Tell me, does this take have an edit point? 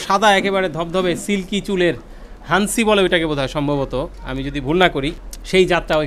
yes; 1 cut; at 5.2 s

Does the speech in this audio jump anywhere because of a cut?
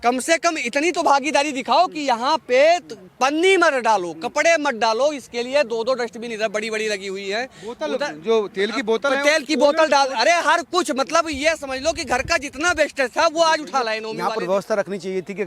yes; 1 cut; at 14.1 s

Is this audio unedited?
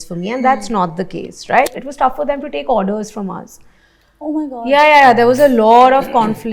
no; 1 cut; at 1.8 s

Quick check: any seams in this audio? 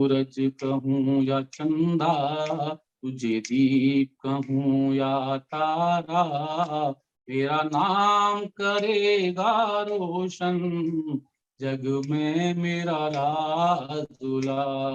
no; 0 cuts

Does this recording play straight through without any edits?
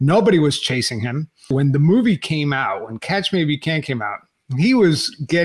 no; 1 cut; at 1.5 s

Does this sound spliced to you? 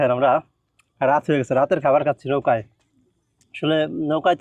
no; 0 cuts

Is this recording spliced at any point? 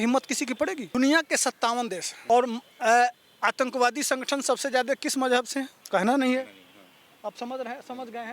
yes; 3 cuts; at 0.9 s, 2.1 s, 5.8 s

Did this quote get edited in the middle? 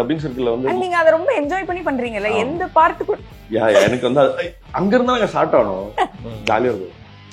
no; 0 cuts

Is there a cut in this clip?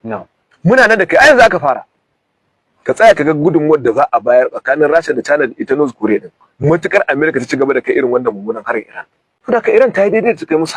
yes; 1 cut; at 9.6 s

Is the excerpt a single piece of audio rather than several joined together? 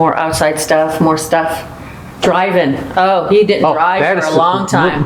yes; 0 cuts

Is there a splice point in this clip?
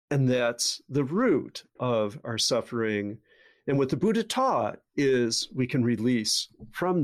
no; 0 cuts

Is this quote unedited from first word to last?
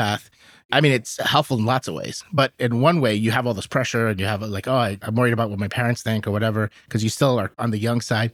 yes; 0 cuts

